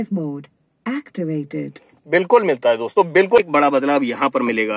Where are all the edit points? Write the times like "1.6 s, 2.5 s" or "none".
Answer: 3.4 s